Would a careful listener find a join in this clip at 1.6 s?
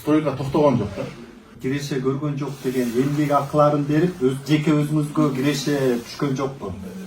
yes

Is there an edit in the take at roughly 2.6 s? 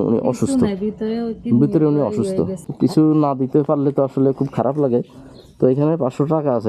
yes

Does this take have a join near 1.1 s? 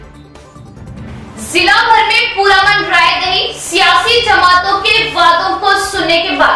yes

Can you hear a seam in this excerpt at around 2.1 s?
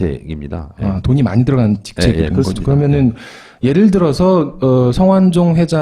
yes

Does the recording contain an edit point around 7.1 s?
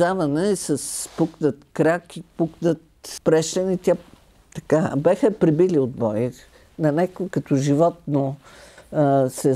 no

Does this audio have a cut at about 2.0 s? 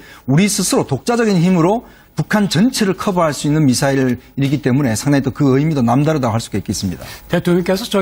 no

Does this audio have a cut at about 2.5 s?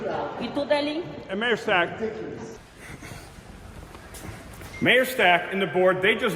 yes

